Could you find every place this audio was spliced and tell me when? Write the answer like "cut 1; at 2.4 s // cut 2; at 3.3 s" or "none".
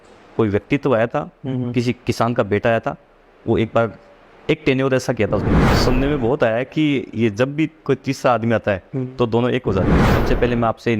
cut 1; at 5.7 s // cut 2; at 10.0 s